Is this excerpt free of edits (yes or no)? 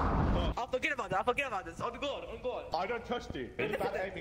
yes